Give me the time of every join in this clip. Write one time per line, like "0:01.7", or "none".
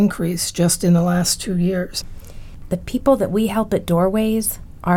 0:02.5